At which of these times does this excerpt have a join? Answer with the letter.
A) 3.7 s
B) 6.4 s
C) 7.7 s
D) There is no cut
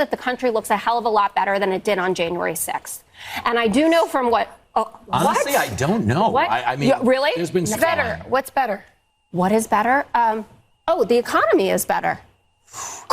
C